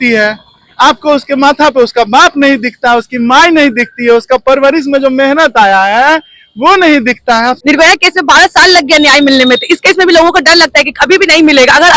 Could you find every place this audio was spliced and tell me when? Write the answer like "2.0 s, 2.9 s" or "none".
7.6 s